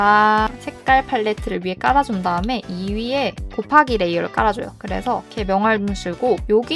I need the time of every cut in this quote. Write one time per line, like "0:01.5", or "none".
none